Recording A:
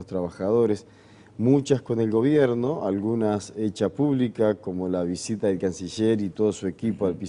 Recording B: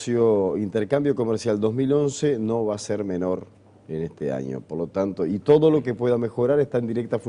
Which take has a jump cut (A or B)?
A